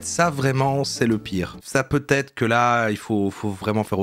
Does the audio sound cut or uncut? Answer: uncut